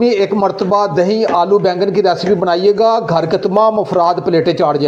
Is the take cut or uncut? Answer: uncut